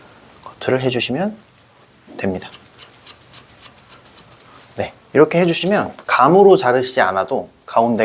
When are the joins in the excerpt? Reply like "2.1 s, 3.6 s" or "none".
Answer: 6.0 s